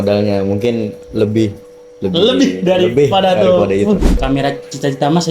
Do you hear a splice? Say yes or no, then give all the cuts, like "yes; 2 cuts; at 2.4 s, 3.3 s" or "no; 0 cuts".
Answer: yes; 1 cut; at 4.2 s